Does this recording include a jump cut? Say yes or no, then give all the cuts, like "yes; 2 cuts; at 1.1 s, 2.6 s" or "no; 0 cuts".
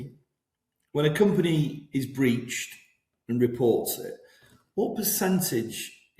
no; 0 cuts